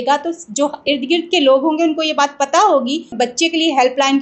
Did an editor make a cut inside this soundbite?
yes; 1 cut; at 3.1 s

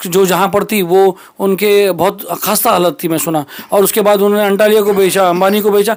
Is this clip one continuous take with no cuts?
yes; 0 cuts

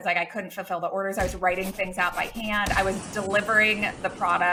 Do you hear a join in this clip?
no; 0 cuts

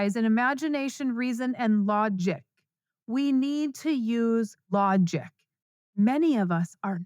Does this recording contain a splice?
yes; 1 cut; at 4.6 s

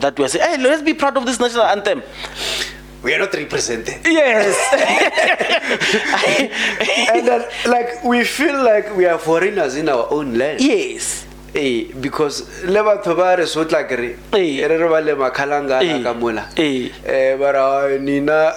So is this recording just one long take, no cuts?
yes; 0 cuts

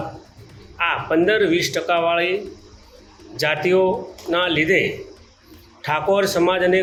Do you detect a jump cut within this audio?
no; 0 cuts

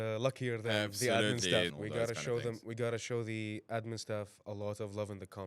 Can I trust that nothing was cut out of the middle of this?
no; 1 cut; at 1.7 s

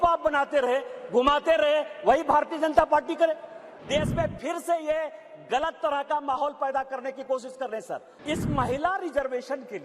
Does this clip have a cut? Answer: yes; 2 cuts; at 3.7 s, 8.1 s

